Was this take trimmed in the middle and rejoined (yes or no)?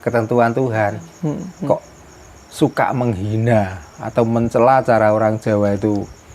yes